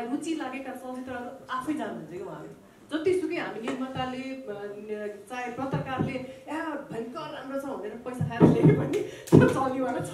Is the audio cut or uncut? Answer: uncut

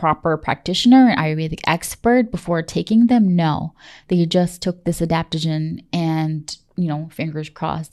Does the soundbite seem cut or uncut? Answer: uncut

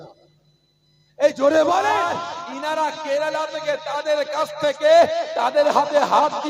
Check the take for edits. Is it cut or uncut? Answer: cut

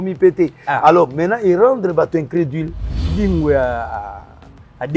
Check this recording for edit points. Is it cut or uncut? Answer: cut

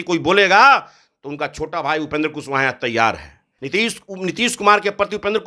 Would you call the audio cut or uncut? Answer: cut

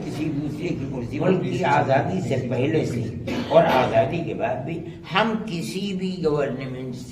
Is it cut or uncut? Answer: cut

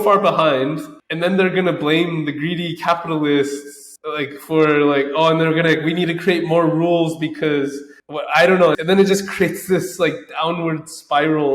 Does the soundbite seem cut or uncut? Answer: uncut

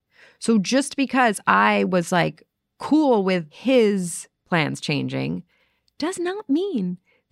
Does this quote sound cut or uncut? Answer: cut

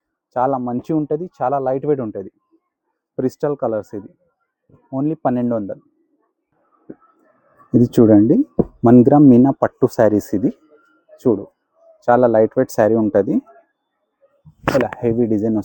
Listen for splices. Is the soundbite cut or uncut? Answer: uncut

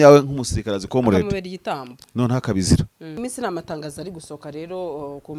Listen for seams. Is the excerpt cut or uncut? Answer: cut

